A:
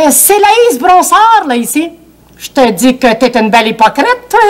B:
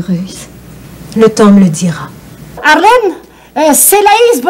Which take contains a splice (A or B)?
B